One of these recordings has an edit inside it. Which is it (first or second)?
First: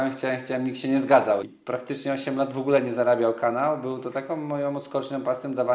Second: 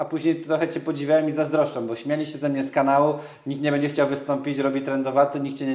first